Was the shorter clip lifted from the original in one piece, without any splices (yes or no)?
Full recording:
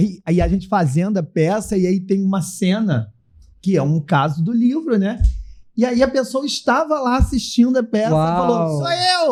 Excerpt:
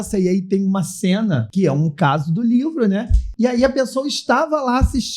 no